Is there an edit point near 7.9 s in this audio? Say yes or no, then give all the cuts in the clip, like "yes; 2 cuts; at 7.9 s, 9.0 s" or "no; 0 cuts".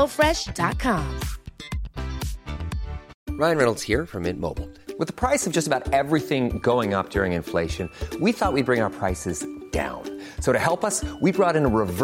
no; 1 cut; at 3.1 s